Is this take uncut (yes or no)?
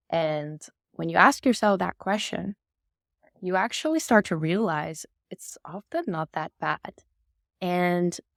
yes